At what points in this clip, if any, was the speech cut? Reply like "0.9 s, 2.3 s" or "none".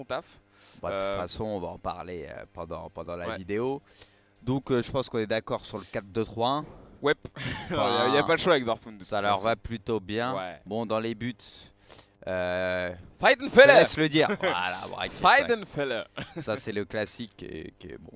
5.6 s